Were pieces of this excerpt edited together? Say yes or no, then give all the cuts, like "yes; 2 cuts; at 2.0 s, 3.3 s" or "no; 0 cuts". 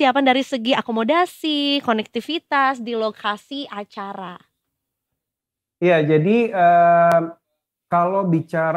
no; 0 cuts